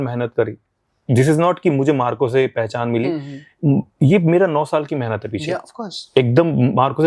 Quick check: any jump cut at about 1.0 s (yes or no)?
no